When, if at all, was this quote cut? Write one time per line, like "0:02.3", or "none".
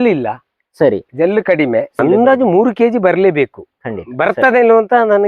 0:01.9